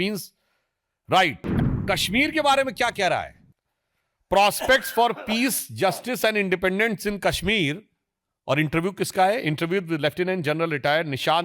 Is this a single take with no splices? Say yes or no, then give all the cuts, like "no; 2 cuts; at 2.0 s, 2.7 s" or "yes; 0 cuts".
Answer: no; 1 cut; at 1.5 s